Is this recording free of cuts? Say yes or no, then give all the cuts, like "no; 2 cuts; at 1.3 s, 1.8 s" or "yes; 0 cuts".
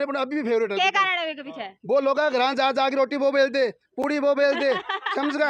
yes; 0 cuts